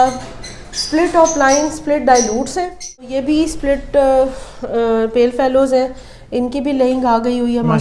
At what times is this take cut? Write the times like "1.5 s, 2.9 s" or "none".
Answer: 3.1 s